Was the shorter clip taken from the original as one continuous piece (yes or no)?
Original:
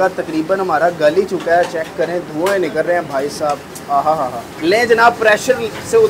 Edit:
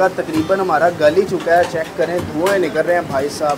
yes